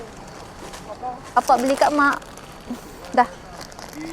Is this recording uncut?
no; 1 cut; at 1.4 s

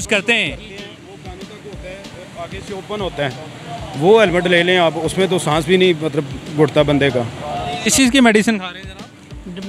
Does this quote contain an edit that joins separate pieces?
yes; 1 cut; at 7.7 s

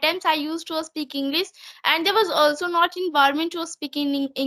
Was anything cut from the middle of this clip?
no; 0 cuts

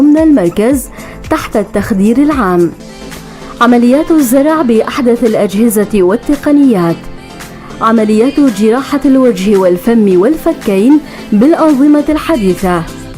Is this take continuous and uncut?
no; 1 cut; at 11.6 s

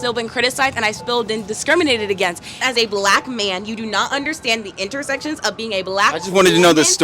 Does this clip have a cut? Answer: yes; 1 cut; at 2.6 s

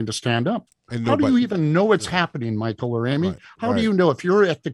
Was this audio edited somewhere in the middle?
no; 0 cuts

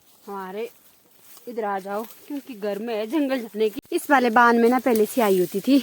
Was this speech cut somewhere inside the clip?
yes; 1 cut; at 3.7 s

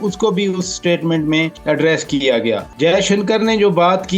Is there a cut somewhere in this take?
yes; 2 cuts; at 1.5 s, 2.7 s

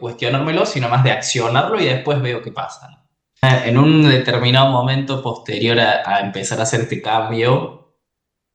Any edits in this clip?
yes; 1 cut; at 3.4 s

